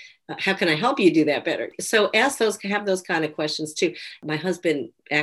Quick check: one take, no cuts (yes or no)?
no